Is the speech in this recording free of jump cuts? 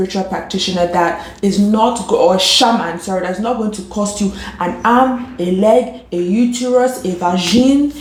yes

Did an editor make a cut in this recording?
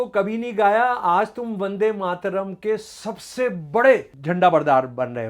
yes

